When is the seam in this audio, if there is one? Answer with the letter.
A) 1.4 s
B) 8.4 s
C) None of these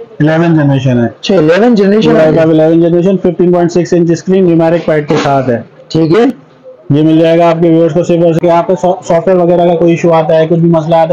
B